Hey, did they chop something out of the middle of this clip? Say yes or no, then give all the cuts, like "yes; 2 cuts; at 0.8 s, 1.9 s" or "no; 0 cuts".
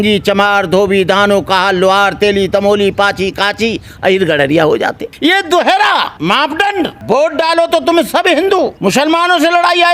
yes; 3 cuts; at 5.0 s, 6.3 s, 8.8 s